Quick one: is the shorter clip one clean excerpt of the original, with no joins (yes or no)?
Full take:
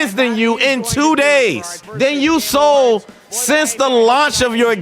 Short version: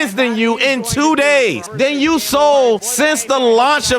no